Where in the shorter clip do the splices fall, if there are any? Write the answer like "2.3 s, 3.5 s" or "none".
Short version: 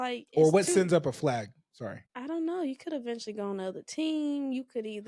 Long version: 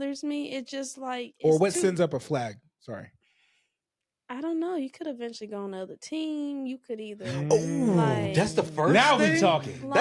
2.1 s